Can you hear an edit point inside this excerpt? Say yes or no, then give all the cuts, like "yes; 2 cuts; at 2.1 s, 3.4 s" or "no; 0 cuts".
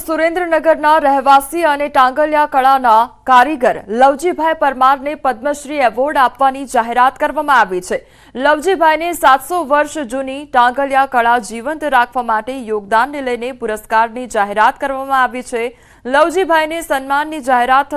no; 0 cuts